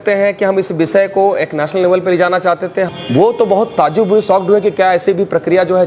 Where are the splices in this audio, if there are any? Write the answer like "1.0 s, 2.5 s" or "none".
2.9 s